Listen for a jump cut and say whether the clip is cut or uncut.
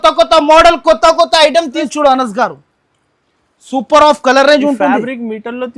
cut